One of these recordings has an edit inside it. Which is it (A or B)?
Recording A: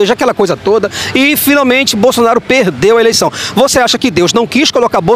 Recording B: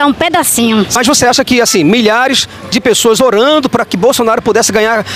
B